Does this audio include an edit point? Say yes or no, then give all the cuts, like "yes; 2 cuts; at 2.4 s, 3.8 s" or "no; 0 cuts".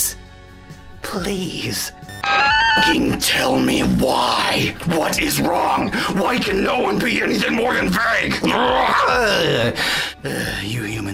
no; 0 cuts